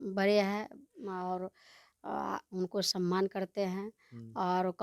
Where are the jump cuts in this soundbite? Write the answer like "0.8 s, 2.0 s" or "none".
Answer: none